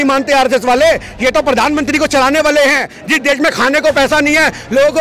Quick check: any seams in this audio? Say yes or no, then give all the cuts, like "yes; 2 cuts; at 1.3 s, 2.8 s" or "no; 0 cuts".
yes; 1 cut; at 3.0 s